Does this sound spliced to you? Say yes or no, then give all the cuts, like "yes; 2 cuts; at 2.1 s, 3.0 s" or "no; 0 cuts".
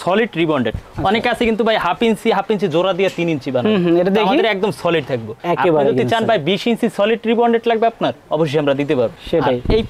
no; 0 cuts